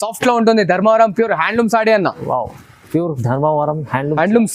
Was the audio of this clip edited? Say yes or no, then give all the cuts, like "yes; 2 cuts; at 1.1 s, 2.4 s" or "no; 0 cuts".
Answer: no; 0 cuts